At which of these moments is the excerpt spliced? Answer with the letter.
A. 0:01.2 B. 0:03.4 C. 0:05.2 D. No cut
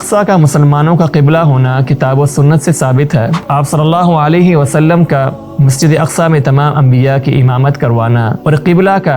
B